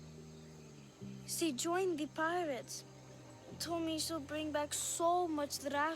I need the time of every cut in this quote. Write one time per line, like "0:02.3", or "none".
0:01.1

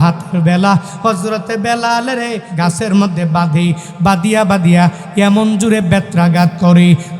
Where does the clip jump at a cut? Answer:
0:02.5

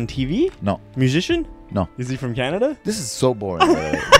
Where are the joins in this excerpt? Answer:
0:00.9
0:02.0

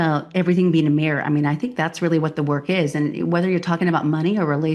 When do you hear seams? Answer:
none

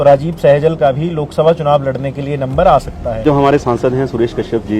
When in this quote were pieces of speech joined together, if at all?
0:03.2

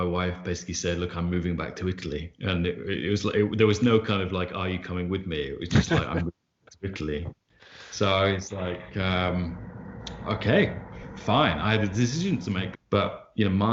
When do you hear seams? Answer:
0:12.7

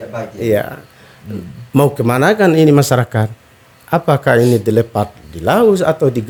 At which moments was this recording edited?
none

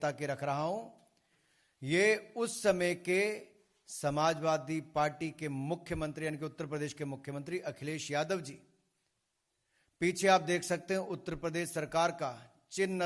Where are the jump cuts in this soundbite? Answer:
none

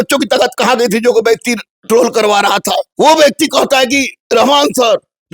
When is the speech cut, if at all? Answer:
0:01.8
0:02.9
0:04.2

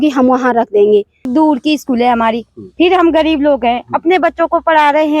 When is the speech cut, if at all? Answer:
0:01.3

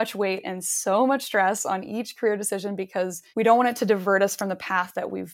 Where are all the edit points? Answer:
0:03.2

